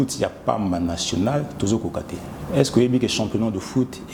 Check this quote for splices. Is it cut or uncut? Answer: uncut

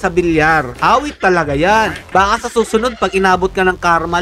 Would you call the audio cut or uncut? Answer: cut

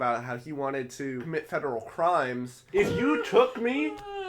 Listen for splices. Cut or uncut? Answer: cut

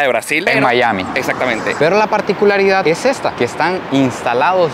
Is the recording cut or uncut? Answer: cut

